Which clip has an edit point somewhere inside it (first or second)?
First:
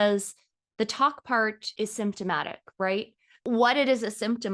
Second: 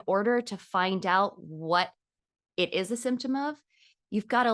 first